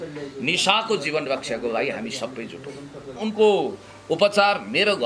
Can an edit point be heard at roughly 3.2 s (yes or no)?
yes